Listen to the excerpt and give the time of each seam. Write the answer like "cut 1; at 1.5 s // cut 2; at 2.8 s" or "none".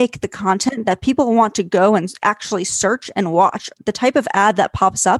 cut 1; at 3.7 s